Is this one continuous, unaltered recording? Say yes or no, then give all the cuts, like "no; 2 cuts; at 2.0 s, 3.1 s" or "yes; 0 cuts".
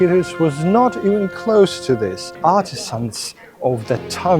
no; 1 cut; at 2.2 s